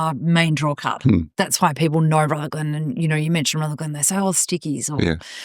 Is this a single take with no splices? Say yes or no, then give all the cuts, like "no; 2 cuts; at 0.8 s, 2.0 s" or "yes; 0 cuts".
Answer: yes; 0 cuts